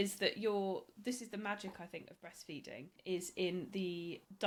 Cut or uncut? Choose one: uncut